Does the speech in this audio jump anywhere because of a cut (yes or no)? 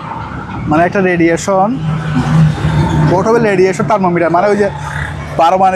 no